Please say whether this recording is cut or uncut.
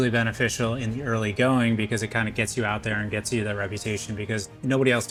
uncut